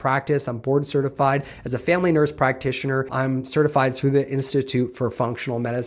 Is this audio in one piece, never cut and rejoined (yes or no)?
no